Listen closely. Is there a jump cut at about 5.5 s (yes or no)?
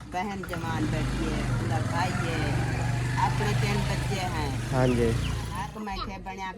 yes